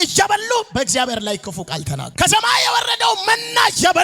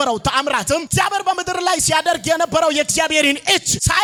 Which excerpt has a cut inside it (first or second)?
first